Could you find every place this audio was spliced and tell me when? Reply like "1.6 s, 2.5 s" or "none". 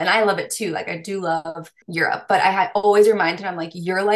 1.8 s